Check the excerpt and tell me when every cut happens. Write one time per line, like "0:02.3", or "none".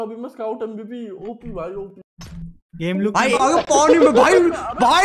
0:03.4